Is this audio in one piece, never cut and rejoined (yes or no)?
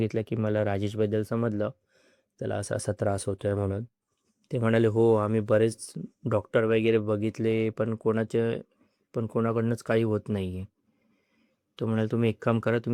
yes